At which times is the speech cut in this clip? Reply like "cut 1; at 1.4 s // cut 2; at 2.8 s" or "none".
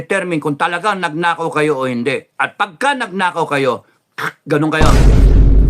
cut 1; at 4.8 s